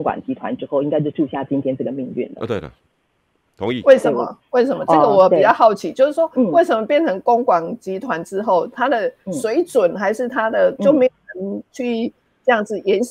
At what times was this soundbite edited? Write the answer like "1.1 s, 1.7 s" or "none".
none